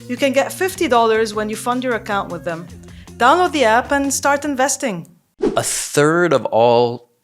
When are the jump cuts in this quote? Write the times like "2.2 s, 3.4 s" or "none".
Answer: 5.4 s